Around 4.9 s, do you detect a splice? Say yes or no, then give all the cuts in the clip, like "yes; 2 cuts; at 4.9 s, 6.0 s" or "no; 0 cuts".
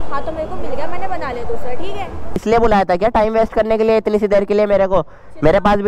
no; 1 cut; at 2.4 s